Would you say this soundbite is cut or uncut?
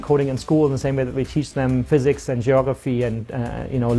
cut